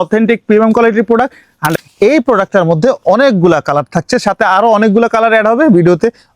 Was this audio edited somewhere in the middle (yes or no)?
yes